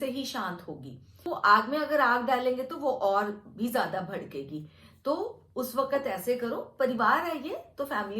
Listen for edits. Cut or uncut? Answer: cut